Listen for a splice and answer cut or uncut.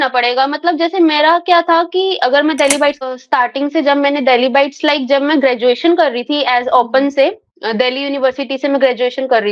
cut